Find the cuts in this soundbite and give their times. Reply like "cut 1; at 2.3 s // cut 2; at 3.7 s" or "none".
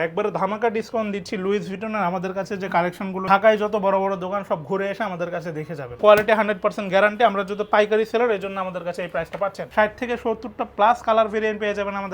cut 1; at 3.2 s // cut 2; at 6.0 s // cut 3; at 9.6 s